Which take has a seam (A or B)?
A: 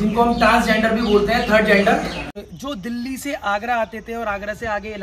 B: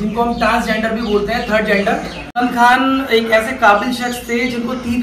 A